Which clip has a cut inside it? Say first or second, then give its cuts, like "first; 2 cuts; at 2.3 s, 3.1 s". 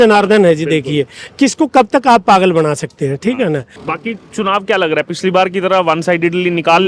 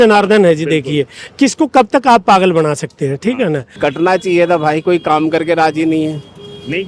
second; 1 cut; at 3.7 s